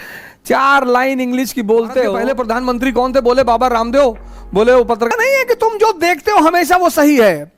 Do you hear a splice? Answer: yes; 2 cuts; at 2.2 s, 4.6 s

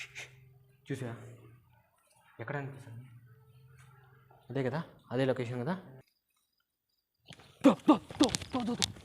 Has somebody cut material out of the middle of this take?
yes; 1 cut; at 6.0 s

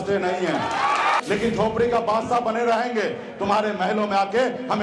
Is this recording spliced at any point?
yes; 1 cut; at 1.2 s

